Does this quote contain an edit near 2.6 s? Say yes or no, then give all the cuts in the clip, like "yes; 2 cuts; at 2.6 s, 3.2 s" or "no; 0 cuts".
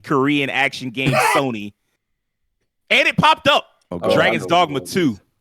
no; 1 cut; at 3.8 s